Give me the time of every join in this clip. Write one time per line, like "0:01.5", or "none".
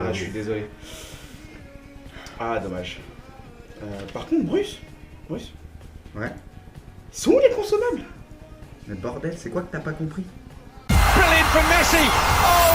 0:03.0